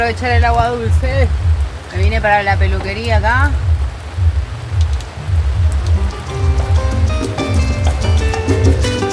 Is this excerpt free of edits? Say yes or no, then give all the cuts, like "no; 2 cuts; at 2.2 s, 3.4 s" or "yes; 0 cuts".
yes; 0 cuts